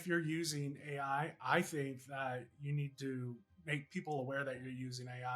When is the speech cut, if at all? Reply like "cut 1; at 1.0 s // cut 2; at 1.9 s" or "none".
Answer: cut 1; at 3.5 s